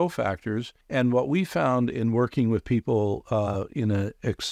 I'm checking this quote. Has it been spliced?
no; 0 cuts

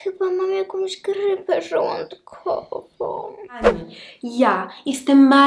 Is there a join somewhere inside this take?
yes; 1 cut; at 3.8 s

